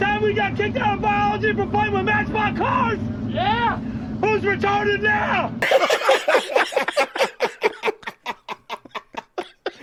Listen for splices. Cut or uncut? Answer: uncut